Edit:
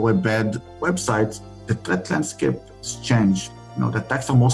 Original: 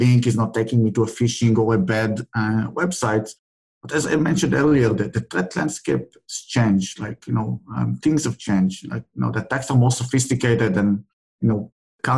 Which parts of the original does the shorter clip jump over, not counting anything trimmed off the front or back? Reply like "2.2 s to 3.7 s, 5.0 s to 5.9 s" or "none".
2.4 s to 2.7 s, 3.7 s to 5.2 s, 7.0 s to 9.0 s